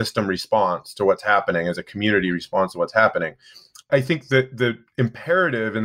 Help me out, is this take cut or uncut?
cut